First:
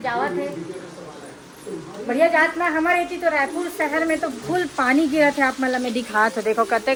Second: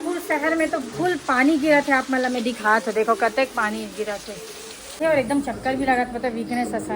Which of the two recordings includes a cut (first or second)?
second